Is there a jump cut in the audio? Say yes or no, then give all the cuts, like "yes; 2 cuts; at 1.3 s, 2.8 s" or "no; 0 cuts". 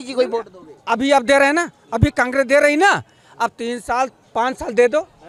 no; 0 cuts